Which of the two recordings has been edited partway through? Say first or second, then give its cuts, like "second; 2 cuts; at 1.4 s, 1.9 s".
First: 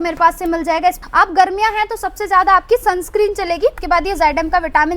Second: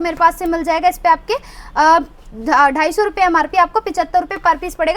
first; 2 cuts; at 1.0 s, 3.8 s